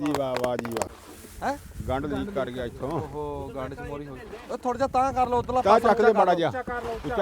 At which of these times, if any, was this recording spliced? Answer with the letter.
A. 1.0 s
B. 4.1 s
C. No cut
A